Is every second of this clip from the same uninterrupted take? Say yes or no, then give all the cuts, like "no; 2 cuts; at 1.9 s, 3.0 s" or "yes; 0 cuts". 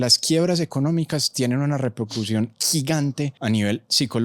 no; 1 cut; at 3.3 s